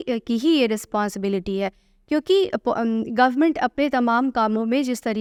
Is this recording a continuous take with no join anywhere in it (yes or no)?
yes